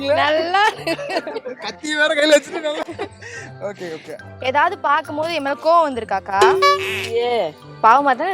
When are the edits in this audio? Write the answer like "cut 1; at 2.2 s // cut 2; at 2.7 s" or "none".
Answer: none